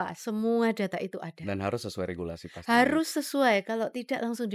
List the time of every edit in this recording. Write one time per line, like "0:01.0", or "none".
none